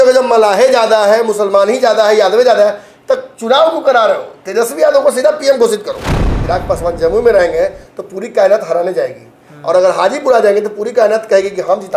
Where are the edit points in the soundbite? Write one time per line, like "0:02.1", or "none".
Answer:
0:06.3